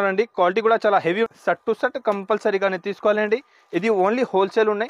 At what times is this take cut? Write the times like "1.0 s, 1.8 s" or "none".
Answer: 1.3 s

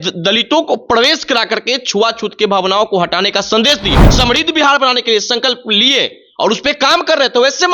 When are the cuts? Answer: 4.0 s

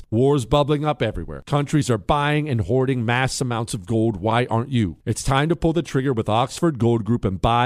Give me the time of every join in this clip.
none

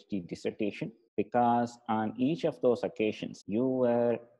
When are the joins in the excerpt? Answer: 1.0 s, 3.3 s

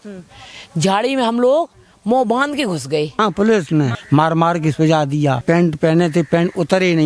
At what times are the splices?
3.2 s, 4.0 s, 5.4 s

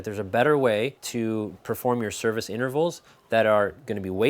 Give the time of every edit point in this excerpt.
1.0 s

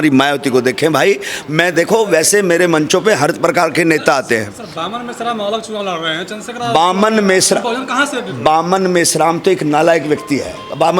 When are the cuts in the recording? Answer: none

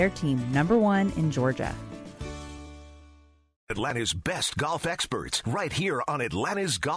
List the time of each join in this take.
3.9 s

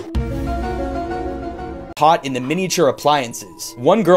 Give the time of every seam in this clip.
1.9 s

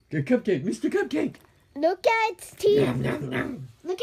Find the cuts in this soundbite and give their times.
2.5 s

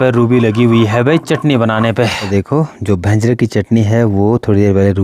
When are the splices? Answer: 2.2 s

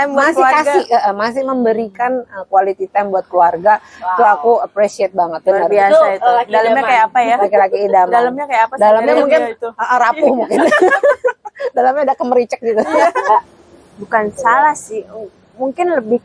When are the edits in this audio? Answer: 13.3 s

